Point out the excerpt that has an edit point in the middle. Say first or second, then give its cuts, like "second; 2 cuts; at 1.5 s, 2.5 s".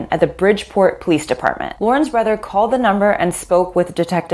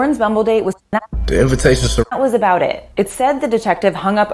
second; 2 cuts; at 0.8 s, 2.0 s